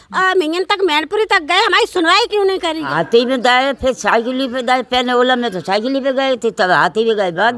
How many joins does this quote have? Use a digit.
1